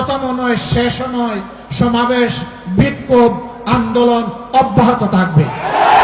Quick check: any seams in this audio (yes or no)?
no